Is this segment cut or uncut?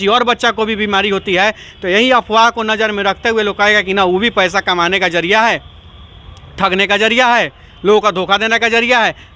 uncut